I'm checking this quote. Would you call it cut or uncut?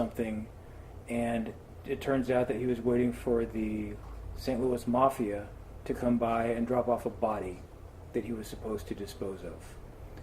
cut